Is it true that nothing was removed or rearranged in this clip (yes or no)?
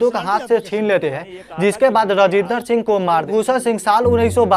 no